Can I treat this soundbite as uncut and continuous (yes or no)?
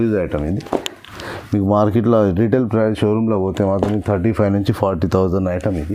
yes